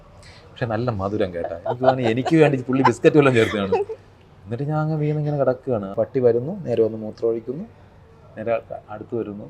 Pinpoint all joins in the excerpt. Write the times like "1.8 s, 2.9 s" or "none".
5.9 s